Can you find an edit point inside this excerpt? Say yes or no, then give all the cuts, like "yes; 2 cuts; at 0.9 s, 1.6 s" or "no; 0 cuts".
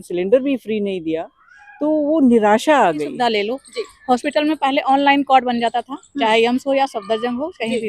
yes; 1 cut; at 3.1 s